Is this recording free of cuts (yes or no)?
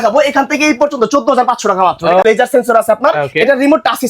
no